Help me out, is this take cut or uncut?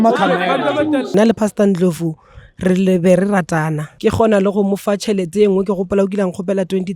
cut